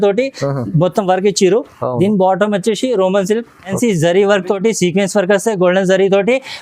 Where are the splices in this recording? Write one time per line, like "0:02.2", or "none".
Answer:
0:03.7